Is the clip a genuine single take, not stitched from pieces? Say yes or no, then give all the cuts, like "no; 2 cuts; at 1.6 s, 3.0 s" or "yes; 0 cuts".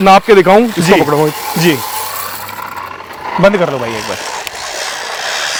yes; 0 cuts